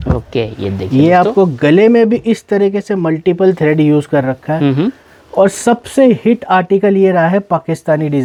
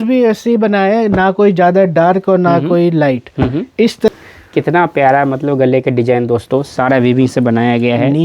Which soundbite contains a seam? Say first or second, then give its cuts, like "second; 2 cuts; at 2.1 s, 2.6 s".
second; 1 cut; at 4.1 s